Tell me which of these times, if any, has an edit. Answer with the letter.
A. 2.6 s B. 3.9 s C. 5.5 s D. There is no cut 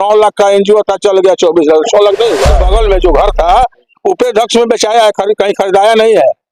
A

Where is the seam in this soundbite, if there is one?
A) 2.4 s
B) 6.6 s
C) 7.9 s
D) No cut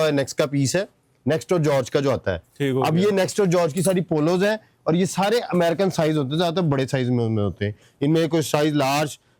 D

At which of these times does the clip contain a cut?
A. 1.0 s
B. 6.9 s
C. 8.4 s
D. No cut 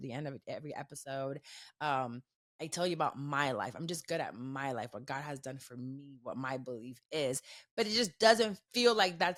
D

